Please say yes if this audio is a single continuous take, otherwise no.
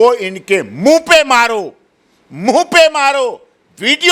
yes